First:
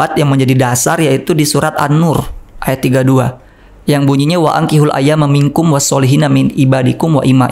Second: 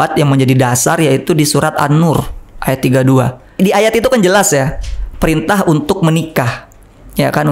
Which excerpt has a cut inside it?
second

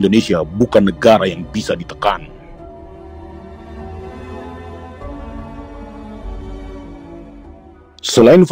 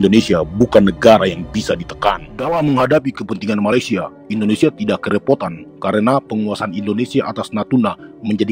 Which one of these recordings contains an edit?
second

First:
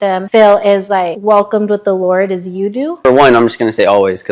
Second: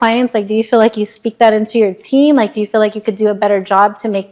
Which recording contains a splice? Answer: first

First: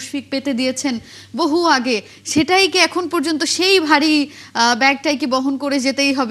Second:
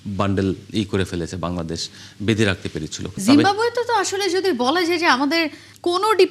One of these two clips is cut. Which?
second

